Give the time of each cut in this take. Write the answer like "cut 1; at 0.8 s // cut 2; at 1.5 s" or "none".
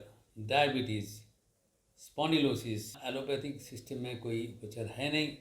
cut 1; at 3.0 s